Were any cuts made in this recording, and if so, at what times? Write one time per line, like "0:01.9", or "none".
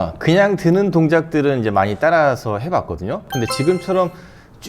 0:03.3